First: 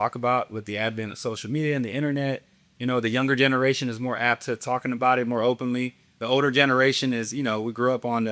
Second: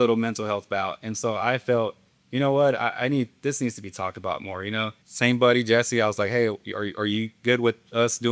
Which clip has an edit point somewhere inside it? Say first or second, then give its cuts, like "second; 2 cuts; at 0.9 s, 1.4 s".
second; 1 cut; at 5.0 s